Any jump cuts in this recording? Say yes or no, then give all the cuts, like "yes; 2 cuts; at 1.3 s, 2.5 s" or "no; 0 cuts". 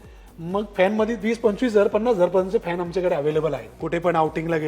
yes; 1 cut; at 3.7 s